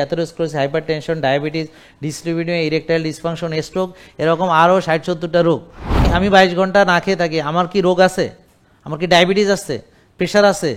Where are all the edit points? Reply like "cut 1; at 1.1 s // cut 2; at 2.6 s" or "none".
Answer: cut 1; at 6.1 s